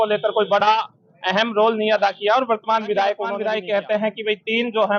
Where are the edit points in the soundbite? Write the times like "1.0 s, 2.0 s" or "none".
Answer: 3.3 s